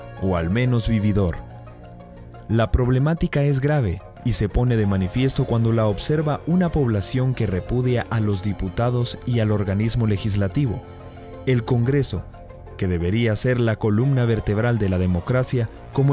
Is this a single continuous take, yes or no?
yes